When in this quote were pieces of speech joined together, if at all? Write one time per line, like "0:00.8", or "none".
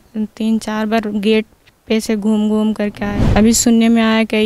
0:03.2